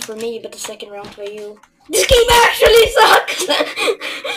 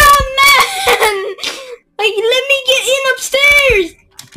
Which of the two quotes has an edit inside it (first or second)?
first